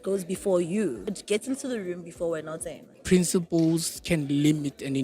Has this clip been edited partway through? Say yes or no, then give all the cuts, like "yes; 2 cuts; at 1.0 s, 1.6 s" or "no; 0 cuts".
yes; 2 cuts; at 1.1 s, 2.9 s